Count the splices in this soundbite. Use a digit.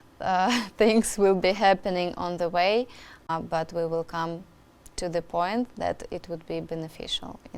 1